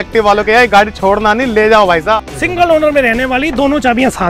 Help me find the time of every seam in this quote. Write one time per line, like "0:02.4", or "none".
0:02.2